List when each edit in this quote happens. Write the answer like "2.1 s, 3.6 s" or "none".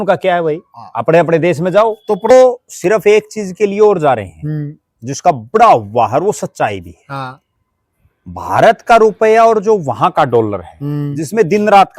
2.3 s